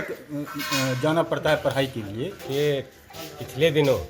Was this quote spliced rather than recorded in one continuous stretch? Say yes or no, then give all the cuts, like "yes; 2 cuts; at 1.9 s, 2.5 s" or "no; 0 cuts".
yes; 1 cut; at 2.4 s